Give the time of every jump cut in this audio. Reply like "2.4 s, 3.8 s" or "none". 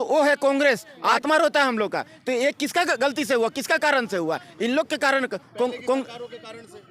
1.2 s

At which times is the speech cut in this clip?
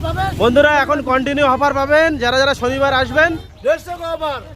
3.5 s

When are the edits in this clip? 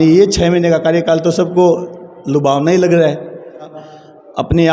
3.8 s

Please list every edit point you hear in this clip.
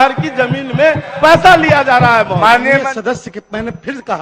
2.8 s

